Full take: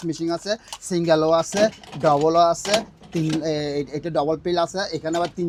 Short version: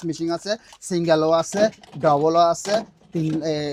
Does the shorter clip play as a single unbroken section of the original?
yes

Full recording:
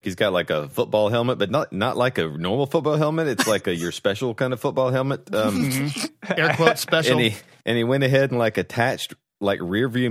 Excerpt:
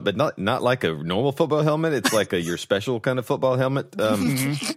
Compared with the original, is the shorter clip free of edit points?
yes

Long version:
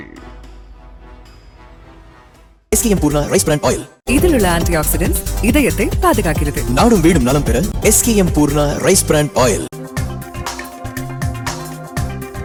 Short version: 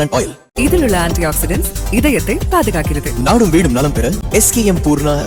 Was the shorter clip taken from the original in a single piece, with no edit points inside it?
yes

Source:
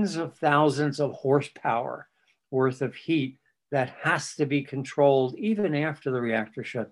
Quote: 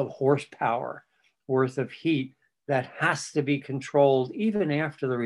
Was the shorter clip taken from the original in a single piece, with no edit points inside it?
yes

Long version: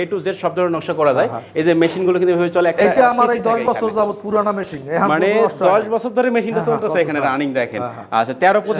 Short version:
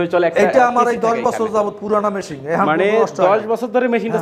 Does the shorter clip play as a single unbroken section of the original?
yes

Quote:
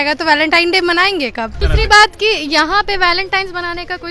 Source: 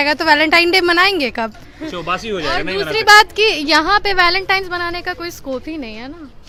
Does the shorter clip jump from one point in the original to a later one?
yes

